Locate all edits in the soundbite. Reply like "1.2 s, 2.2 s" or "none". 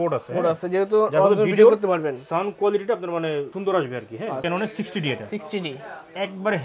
4.4 s